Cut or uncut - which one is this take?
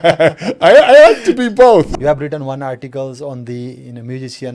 cut